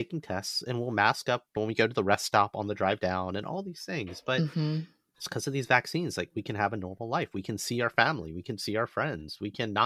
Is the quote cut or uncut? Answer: uncut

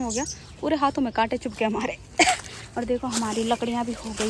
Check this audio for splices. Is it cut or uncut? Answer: uncut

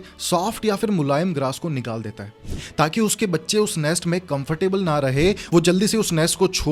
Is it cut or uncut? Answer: uncut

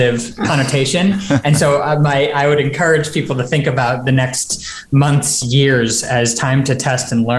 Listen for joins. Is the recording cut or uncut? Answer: uncut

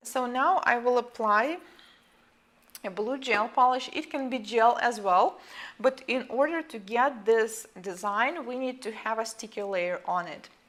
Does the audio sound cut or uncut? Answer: uncut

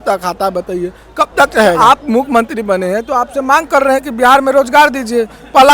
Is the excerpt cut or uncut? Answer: cut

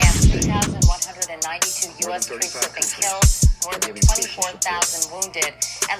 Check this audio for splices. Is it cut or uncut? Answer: uncut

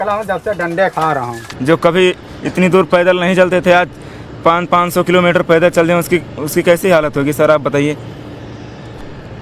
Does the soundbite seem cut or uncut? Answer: cut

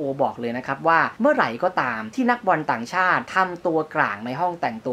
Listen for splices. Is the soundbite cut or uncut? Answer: cut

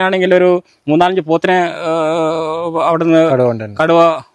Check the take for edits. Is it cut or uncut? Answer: uncut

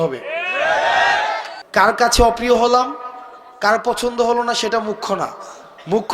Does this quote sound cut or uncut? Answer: cut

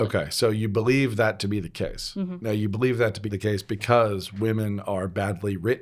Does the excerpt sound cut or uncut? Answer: cut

